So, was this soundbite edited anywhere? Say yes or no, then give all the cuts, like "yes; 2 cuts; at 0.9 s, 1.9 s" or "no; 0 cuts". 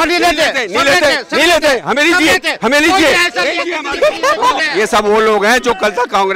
yes; 1 cut; at 4.6 s